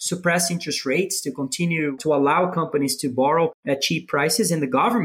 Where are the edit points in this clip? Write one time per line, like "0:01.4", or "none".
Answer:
0:01.9
0:03.6